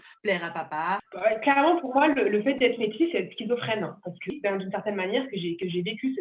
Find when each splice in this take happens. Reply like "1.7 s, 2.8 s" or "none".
1.1 s, 4.3 s